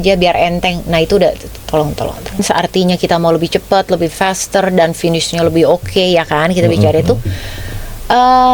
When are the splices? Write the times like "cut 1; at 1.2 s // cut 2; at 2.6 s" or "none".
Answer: cut 1; at 2.4 s